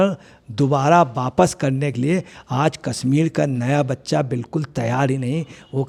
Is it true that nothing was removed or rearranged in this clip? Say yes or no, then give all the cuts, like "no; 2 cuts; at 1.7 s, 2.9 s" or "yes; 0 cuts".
yes; 0 cuts